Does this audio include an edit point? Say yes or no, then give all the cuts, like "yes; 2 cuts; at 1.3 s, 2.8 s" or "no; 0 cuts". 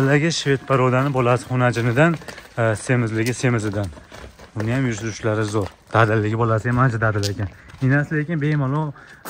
no; 0 cuts